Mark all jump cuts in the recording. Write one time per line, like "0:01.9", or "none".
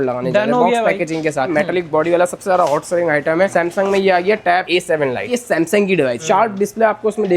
0:01.5
0:05.3
0:06.2